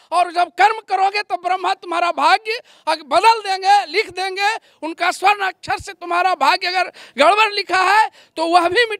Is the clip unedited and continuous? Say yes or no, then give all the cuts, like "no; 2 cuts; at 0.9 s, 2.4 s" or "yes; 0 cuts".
yes; 0 cuts